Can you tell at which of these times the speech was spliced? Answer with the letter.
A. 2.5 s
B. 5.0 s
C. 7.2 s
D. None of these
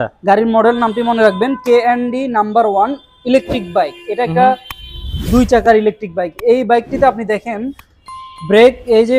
D